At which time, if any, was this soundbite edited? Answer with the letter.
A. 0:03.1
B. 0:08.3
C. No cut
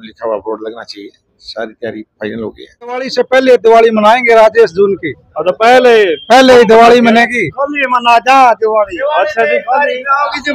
A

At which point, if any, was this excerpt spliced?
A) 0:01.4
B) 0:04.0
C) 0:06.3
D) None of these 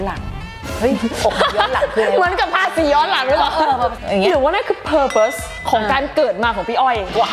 B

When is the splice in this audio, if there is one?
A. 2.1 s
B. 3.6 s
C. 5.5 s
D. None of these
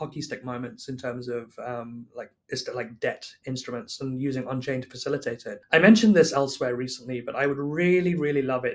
C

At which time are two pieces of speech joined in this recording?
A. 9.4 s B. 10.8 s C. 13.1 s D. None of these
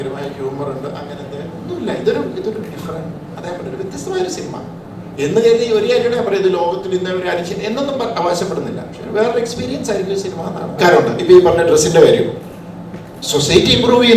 B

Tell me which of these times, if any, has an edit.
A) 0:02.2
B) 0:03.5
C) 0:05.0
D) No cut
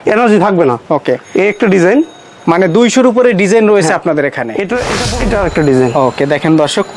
C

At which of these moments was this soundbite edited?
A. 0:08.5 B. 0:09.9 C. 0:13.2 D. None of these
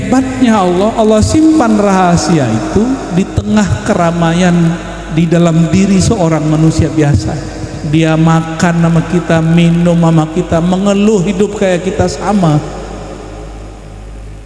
D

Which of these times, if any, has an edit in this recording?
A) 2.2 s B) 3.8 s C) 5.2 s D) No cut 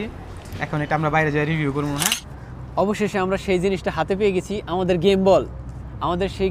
A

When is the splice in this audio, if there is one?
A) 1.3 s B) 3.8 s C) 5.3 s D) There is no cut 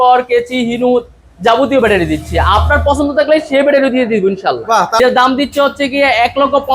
C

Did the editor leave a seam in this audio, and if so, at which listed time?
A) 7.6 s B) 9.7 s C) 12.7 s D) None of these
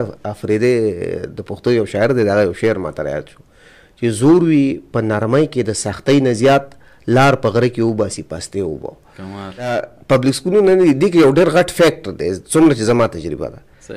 B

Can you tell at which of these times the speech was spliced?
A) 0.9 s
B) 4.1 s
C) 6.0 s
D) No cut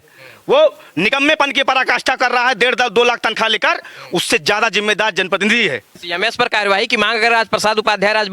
C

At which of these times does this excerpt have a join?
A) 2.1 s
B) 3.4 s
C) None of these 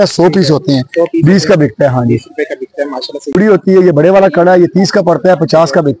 B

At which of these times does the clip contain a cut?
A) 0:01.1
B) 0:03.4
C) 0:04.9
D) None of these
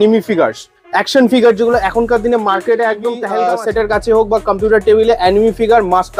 B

